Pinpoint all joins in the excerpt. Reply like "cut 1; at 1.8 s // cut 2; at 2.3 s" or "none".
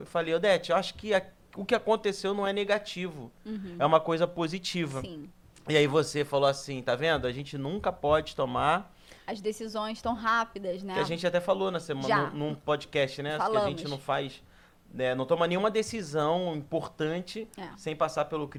none